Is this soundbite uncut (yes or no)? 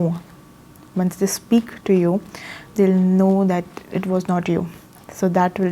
yes